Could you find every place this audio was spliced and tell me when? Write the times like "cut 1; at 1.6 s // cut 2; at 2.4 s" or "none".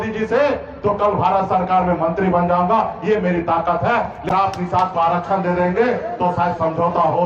cut 1; at 4.3 s